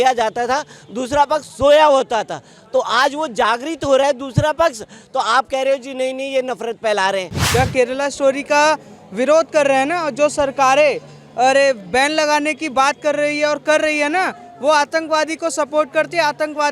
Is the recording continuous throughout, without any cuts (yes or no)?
no